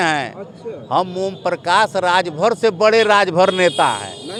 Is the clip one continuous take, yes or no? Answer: yes